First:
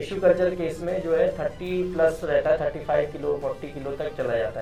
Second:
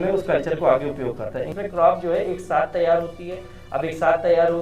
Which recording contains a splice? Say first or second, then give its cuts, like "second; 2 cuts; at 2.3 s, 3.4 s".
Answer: second; 1 cut; at 1.5 s